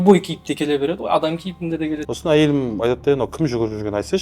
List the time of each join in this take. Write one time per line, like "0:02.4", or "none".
0:02.1